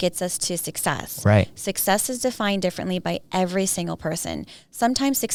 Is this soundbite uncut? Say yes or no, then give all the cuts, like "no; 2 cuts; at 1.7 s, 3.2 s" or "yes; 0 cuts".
yes; 0 cuts